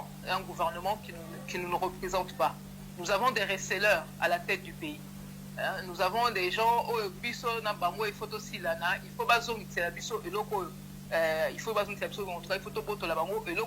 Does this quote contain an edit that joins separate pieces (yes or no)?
no